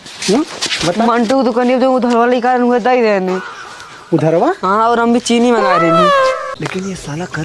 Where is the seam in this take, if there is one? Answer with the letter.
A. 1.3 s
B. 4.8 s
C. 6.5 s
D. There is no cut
C